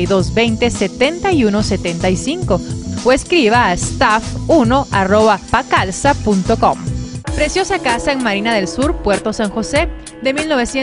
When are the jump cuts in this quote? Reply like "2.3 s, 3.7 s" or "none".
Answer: 4.3 s